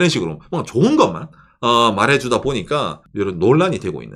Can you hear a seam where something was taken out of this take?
yes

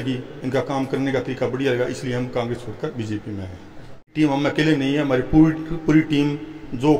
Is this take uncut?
no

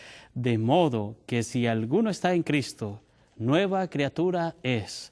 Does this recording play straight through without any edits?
no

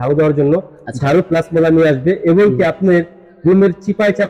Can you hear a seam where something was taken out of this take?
no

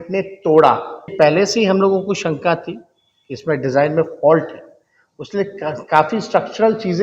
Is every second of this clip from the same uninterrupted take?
no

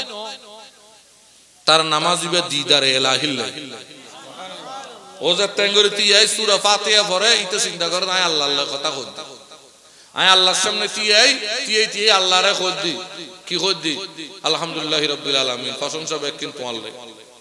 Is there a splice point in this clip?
no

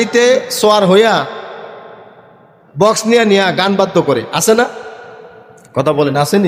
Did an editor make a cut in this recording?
no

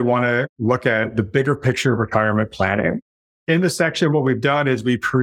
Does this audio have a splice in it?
no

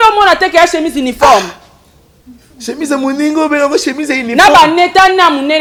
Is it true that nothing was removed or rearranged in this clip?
yes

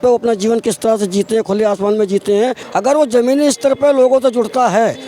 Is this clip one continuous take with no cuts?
no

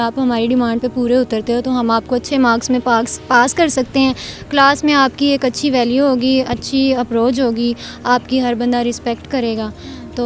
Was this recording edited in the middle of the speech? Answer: no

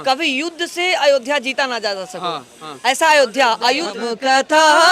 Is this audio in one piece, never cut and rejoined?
no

